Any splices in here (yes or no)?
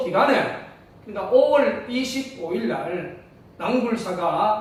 no